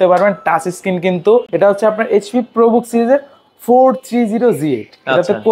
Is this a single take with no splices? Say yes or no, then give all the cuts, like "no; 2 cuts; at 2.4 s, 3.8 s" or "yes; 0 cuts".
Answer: no; 1 cut; at 1.5 s